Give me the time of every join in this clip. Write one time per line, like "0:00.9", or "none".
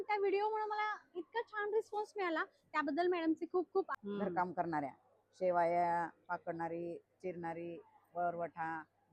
0:04.0